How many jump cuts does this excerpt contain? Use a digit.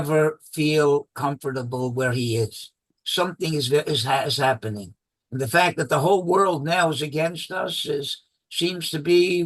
1